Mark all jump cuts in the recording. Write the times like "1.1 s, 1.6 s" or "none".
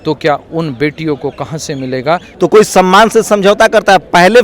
2.3 s